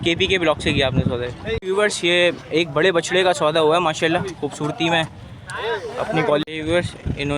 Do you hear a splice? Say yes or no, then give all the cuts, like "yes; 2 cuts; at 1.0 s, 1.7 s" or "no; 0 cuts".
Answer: yes; 2 cuts; at 1.6 s, 6.4 s